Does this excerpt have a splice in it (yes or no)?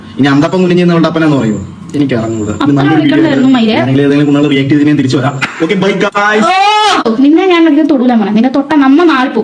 no